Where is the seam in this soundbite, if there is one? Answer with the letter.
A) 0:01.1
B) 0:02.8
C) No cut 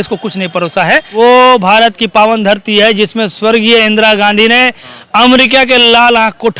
A